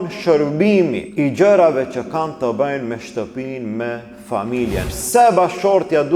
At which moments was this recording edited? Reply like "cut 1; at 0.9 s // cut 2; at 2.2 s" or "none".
cut 1; at 1.0 s // cut 2; at 4.9 s